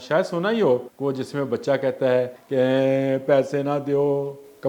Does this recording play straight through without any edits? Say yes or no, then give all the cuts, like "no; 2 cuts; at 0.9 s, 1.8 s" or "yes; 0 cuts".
no; 2 cuts; at 0.9 s, 2.4 s